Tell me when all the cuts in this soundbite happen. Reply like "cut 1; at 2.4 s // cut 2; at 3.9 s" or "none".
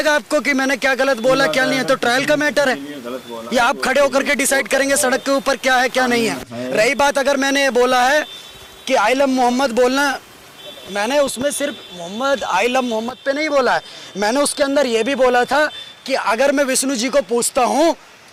none